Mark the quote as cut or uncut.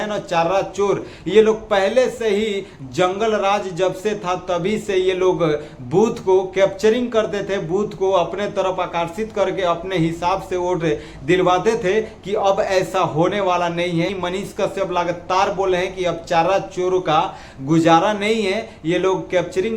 cut